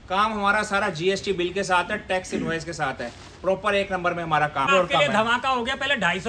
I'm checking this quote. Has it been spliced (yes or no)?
yes